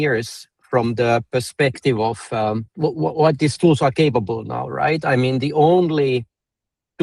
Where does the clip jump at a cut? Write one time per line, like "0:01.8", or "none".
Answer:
0:02.7